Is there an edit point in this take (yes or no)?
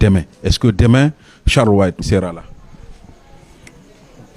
yes